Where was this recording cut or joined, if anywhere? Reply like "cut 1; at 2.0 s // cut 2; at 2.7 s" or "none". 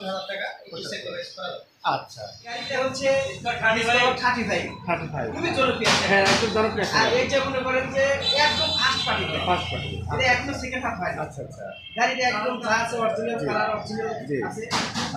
cut 1; at 2.6 s